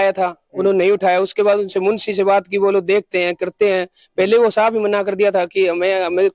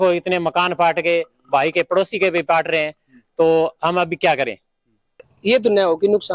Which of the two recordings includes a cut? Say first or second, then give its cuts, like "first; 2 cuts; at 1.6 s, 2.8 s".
second; 1 cut; at 5.3 s